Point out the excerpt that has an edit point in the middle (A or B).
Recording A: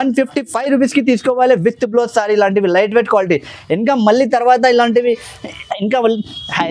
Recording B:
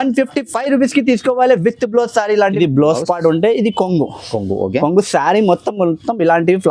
B